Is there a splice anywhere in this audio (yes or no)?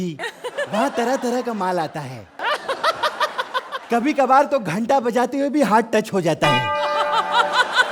no